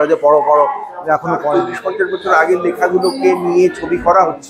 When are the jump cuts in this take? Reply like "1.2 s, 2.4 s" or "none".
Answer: 1.4 s

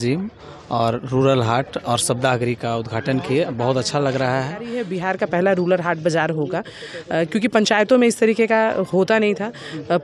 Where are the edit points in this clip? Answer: 4.8 s

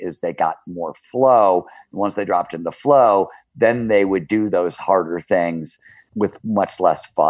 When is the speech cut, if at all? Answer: 6.0 s

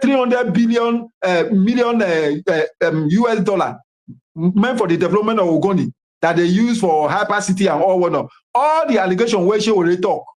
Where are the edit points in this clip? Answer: none

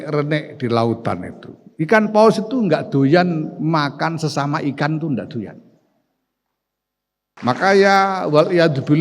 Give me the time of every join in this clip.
7.3 s

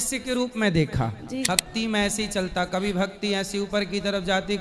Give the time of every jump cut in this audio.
1.5 s

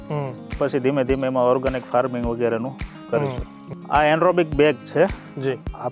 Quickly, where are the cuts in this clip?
3.5 s

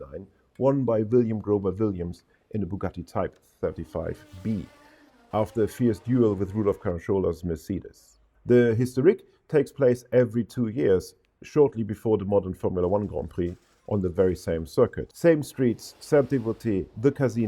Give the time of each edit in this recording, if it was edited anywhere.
15.0 s

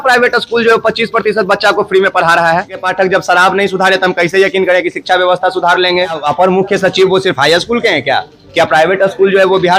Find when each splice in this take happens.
2.8 s, 6.2 s

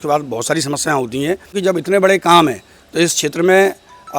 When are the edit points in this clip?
1.6 s

